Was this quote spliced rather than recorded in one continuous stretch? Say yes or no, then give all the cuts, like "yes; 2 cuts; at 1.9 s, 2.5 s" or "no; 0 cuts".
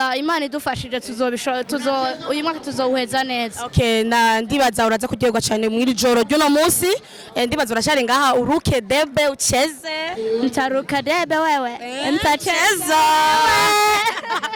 no; 0 cuts